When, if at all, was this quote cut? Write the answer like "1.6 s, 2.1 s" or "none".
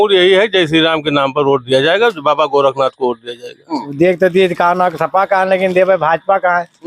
3.9 s